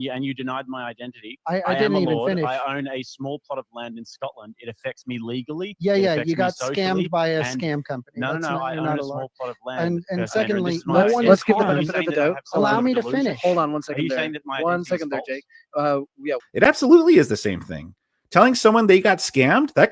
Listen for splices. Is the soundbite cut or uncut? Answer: cut